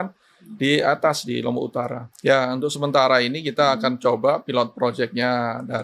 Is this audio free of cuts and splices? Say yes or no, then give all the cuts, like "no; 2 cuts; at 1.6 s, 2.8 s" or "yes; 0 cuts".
no; 1 cut; at 2.0 s